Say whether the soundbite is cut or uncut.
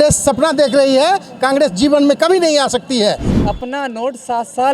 cut